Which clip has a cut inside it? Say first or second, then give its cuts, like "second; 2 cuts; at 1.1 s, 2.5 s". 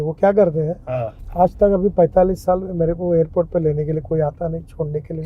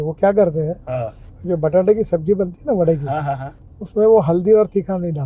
first; 1 cut; at 1.2 s